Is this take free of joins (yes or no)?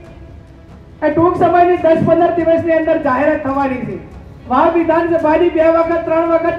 no